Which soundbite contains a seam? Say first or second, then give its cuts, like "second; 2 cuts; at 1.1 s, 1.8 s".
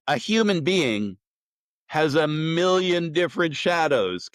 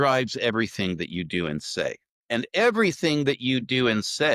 second; 1 cut; at 2.1 s